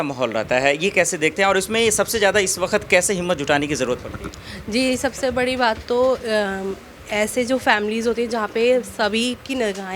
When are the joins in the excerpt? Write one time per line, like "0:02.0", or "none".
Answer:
none